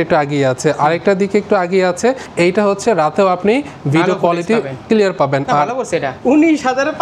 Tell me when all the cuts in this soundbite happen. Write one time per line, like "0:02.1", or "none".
0:02.2
0:06.1